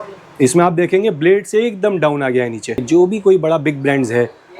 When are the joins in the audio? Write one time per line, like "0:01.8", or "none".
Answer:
0:02.8